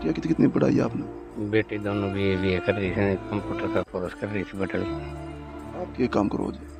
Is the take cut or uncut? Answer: uncut